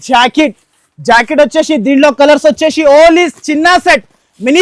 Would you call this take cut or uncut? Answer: uncut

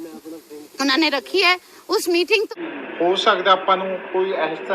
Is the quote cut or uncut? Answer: cut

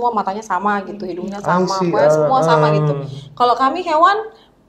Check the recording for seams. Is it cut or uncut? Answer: uncut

